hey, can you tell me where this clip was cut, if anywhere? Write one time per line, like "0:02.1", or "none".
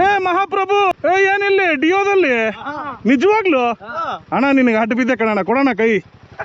0:00.9